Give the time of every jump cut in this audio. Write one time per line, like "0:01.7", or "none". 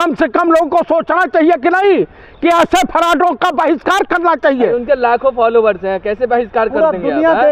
none